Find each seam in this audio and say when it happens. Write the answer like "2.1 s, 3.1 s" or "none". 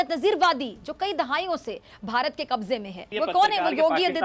3.0 s